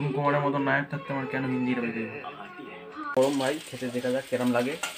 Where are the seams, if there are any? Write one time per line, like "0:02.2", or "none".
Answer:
0:03.1